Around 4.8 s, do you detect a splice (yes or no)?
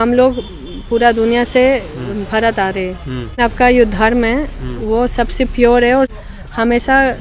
no